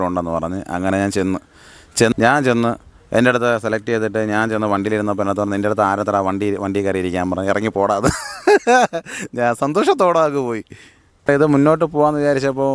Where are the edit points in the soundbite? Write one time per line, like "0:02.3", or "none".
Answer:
0:02.1
0:11.3